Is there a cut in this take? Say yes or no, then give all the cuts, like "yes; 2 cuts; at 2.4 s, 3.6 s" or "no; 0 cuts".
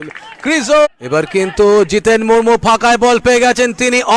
yes; 1 cut; at 0.9 s